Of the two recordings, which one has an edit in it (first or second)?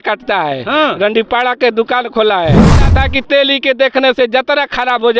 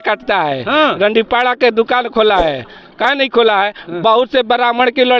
first